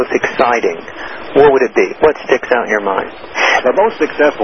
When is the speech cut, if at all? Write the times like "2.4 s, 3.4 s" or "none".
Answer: 3.4 s